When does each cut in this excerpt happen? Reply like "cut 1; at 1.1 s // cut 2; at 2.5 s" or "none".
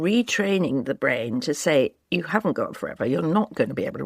cut 1; at 0.9 s